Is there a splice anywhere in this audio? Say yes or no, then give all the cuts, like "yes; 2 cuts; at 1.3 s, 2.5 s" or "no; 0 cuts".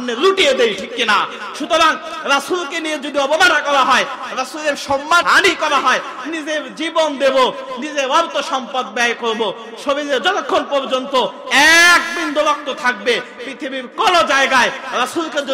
yes; 2 cuts; at 5.2 s, 7.8 s